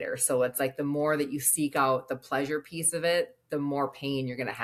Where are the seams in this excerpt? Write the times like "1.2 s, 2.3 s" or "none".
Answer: none